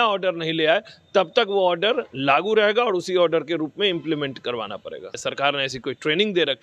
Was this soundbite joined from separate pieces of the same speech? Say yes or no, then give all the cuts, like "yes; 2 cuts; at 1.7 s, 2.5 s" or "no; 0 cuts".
yes; 1 cut; at 5.1 s